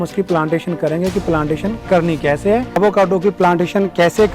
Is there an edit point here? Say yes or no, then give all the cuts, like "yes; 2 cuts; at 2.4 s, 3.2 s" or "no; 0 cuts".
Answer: yes; 1 cut; at 2.8 s